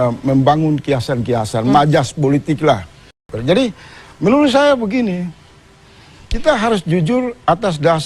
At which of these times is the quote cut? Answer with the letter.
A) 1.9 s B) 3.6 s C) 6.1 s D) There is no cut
B